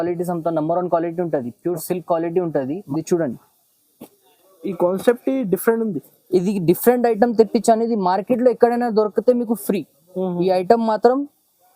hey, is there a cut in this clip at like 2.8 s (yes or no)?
yes